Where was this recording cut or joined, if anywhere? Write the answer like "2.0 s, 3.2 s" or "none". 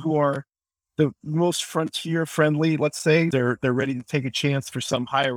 3.3 s

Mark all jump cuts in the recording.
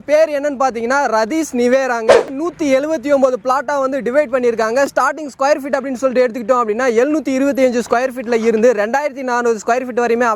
2.3 s

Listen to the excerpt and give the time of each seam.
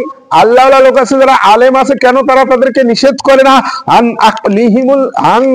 none

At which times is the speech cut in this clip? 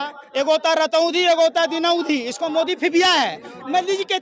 none

